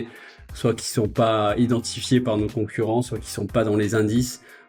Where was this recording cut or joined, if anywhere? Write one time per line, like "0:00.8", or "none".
none